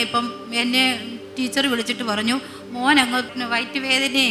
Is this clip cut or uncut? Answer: cut